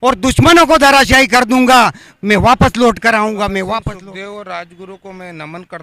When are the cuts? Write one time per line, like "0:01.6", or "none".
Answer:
0:03.8